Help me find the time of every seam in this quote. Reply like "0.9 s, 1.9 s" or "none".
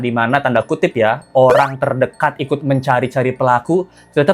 none